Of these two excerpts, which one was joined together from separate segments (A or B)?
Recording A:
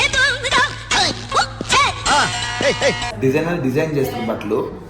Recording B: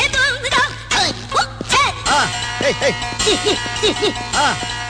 A